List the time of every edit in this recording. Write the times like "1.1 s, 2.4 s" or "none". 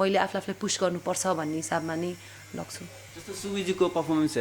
none